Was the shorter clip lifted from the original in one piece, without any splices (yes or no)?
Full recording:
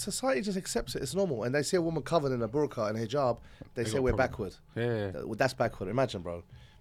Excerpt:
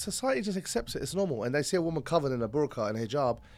yes